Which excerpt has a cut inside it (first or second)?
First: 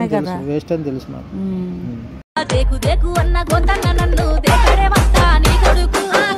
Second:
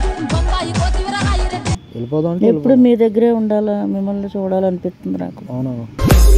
second